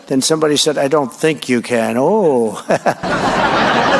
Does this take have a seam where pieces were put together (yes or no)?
no